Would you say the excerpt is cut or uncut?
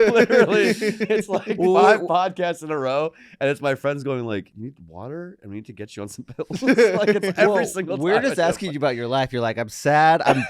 cut